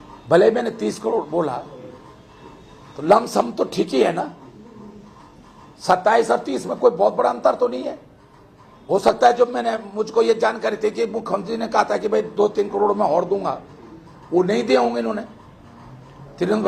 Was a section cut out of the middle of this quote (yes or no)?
no